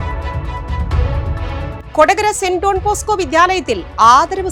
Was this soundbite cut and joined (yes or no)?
yes